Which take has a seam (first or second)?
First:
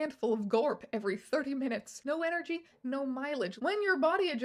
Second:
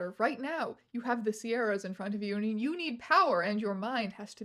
first